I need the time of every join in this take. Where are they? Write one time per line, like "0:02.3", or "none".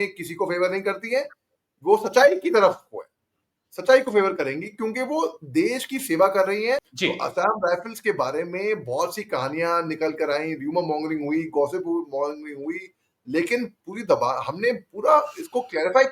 0:06.9